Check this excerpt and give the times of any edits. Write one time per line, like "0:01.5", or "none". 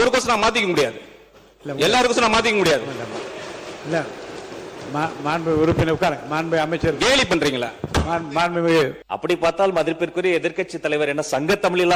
0:09.0